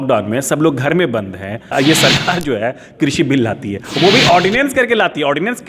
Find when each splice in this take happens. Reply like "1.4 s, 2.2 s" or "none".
1.7 s